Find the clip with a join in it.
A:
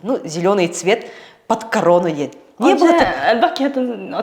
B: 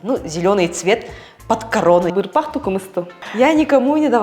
B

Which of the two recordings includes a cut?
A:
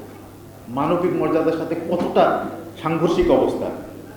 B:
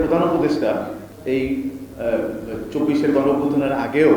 B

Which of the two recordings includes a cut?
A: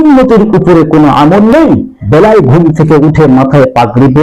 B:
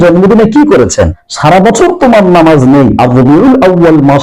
B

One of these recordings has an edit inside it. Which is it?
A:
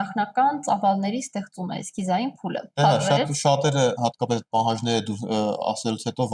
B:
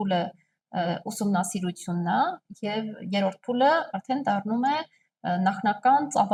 A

